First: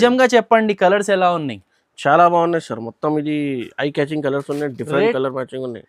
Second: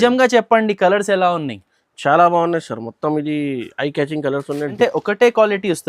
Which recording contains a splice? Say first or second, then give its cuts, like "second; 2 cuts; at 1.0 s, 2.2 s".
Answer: second; 1 cut; at 4.8 s